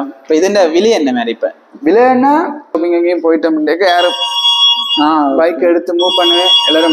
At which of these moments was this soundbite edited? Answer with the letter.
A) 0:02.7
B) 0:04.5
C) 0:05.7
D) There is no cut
A